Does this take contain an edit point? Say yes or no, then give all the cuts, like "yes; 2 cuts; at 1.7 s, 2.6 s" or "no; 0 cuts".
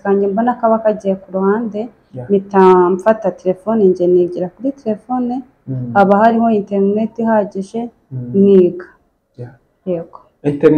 no; 0 cuts